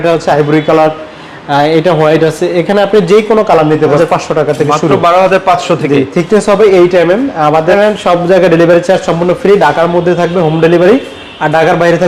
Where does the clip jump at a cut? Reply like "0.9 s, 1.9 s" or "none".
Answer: 3.8 s, 7.7 s